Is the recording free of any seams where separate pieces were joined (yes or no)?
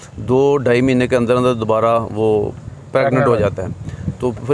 yes